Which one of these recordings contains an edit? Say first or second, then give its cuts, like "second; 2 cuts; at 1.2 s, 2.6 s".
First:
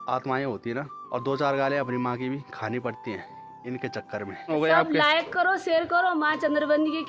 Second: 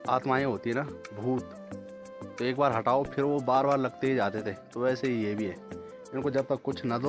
first; 2 cuts; at 1.0 s, 4.5 s